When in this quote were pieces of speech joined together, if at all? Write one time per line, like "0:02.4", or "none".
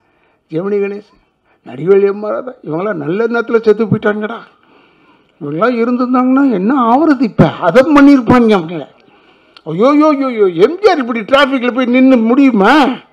none